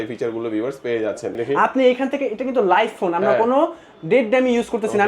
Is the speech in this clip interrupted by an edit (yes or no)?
yes